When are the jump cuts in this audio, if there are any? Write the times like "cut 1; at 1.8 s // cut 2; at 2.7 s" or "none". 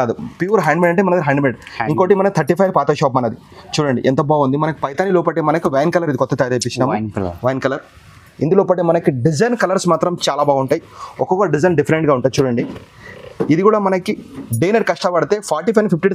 none